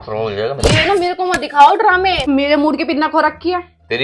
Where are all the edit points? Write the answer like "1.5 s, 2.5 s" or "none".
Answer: 2.2 s